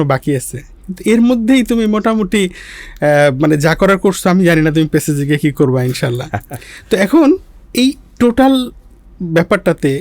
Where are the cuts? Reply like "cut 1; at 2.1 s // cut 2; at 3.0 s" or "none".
none